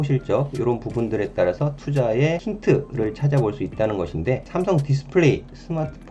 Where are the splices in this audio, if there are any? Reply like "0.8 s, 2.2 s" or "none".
2.5 s, 4.5 s